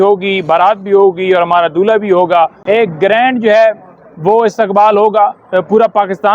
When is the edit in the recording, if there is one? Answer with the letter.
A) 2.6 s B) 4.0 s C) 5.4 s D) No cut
A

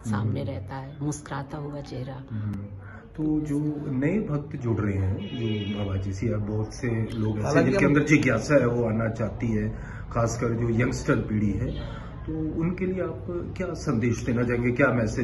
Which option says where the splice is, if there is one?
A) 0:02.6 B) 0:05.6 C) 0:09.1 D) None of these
D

